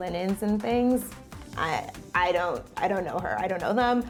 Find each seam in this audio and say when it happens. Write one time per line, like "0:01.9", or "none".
none